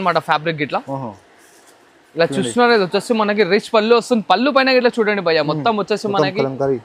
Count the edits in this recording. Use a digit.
0